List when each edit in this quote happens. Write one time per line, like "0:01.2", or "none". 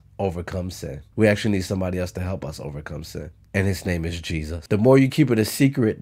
0:01.0
0:04.6